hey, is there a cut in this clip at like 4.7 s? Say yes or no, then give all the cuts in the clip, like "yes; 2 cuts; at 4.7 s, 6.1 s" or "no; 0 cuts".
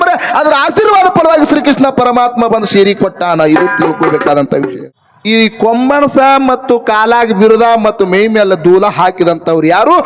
yes; 1 cut; at 4.7 s